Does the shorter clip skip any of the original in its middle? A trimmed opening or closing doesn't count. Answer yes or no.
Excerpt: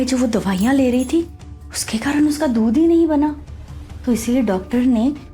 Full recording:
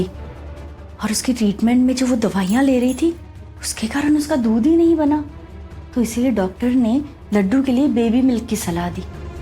no